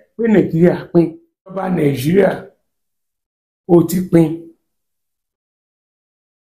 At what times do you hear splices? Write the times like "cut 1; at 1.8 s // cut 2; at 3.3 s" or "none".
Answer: cut 1; at 1.7 s